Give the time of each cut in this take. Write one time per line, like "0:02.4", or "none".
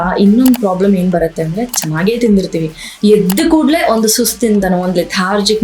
none